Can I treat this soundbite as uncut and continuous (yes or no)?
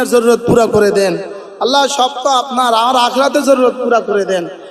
yes